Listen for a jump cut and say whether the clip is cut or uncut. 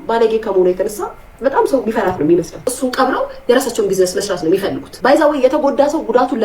cut